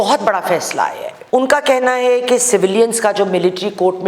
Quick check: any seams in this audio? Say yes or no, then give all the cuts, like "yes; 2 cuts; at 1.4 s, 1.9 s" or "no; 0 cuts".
yes; 1 cut; at 1.1 s